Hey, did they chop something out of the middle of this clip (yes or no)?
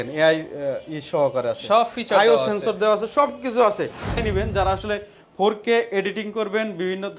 yes